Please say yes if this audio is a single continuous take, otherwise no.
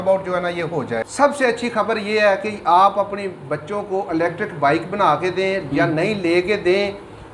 no